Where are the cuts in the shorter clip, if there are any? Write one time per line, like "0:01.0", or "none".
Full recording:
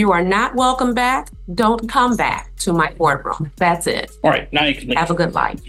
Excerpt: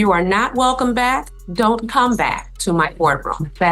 none

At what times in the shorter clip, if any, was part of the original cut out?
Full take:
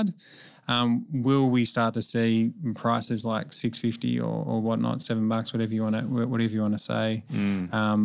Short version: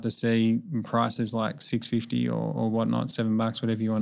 none

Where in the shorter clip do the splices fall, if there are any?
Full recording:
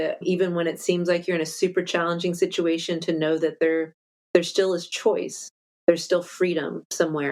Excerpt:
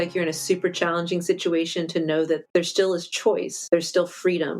0:02.4
0:03.5

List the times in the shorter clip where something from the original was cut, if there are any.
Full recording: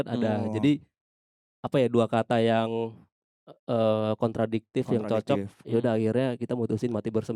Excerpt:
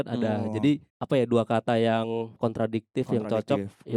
0:00.9
0:02.4

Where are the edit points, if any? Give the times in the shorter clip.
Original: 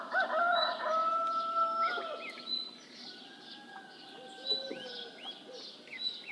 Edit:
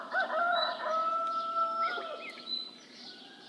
none

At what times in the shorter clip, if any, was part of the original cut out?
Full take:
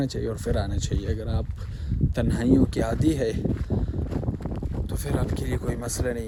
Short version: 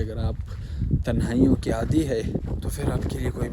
0:02.4

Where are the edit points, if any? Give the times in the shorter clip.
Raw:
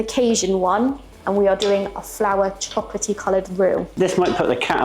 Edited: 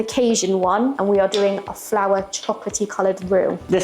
0:01.0

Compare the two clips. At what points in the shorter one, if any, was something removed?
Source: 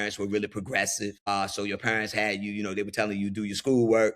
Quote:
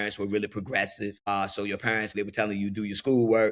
0:02.1

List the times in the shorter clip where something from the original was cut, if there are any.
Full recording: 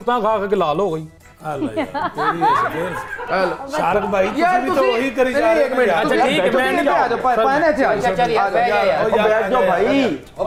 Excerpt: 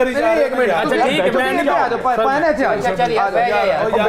none

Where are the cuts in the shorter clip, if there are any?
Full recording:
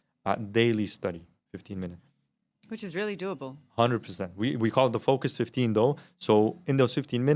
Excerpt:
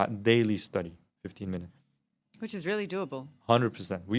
none

